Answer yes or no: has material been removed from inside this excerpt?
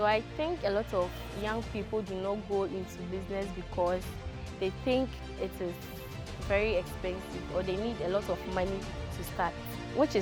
no